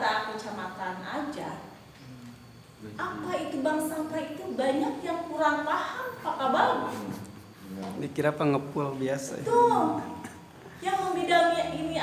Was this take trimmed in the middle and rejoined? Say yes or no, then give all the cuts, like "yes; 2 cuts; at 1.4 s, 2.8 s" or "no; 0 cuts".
no; 0 cuts